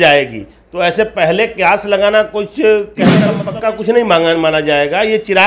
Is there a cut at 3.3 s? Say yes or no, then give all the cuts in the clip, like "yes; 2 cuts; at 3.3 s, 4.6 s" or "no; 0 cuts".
yes; 1 cut; at 3.3 s